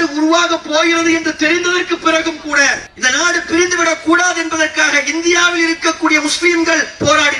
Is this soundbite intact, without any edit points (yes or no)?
yes